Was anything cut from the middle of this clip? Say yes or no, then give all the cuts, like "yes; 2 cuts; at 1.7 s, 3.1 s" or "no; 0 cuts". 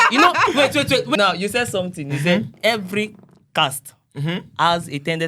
yes; 1 cut; at 1.1 s